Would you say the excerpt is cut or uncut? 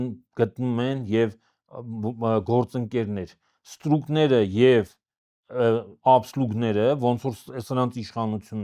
uncut